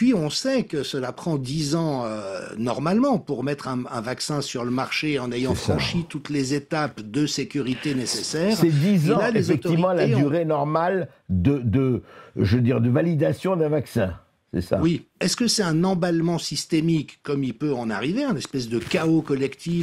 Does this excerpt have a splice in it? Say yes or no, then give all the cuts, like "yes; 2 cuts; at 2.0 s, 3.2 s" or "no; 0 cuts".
yes; 1 cut; at 15.2 s